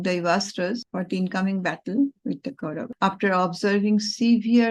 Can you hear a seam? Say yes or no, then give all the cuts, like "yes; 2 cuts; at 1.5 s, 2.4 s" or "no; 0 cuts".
yes; 2 cuts; at 0.9 s, 2.8 s